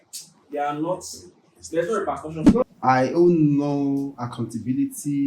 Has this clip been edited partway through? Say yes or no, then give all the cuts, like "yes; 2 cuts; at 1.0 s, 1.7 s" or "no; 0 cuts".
yes; 1 cut; at 2.6 s